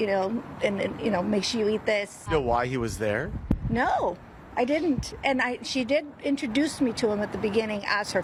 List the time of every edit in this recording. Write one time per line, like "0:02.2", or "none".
none